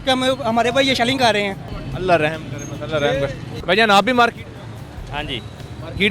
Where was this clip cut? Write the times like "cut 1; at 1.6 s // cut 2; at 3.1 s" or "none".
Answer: none